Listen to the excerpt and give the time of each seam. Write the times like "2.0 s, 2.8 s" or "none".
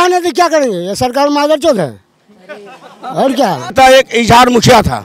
3.7 s